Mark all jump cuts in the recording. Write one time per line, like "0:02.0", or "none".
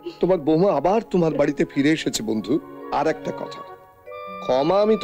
0:02.8

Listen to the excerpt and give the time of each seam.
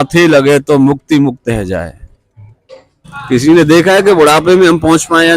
0:03.0

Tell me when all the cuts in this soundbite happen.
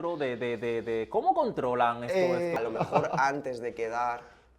0:02.6

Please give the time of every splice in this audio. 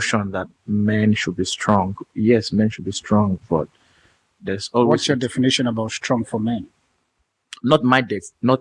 none

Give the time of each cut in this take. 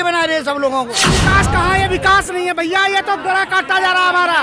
0:01.0

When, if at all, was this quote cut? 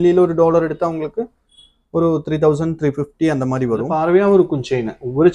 0:03.9

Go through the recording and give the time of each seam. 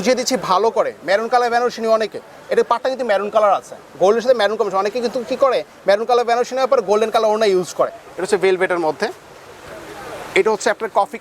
0:08.1

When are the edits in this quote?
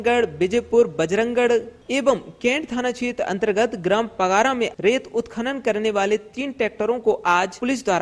none

